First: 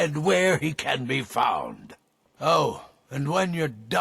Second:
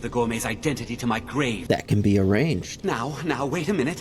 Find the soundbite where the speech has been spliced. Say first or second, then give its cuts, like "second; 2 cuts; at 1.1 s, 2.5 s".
second; 2 cuts; at 1.6 s, 2.7 s